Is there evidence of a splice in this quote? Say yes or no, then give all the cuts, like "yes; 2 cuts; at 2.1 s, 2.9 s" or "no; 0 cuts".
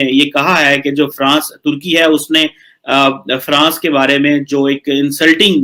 no; 0 cuts